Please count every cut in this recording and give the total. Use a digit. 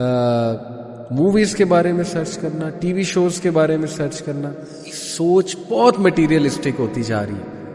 1